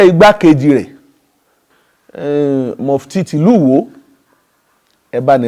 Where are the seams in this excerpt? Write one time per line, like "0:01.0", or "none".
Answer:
none

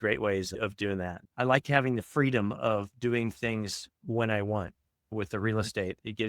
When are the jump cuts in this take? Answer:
0:01.2

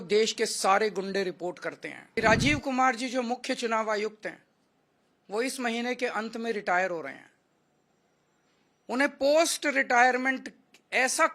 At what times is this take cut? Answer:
0:01.9

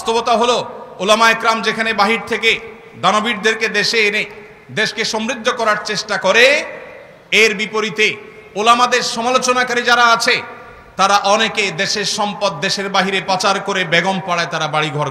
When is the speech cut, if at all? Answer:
none

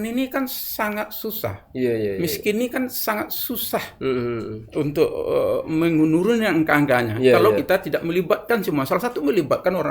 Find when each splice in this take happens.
none

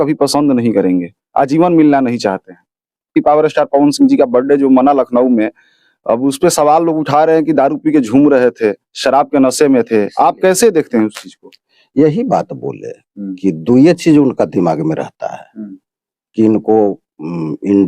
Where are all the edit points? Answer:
0:03.2

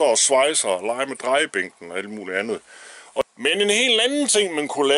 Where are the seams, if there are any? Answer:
0:03.2

